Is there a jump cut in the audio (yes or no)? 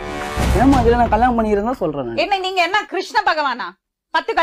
no